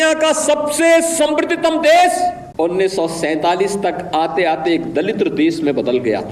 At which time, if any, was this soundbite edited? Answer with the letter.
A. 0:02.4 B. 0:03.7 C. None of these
A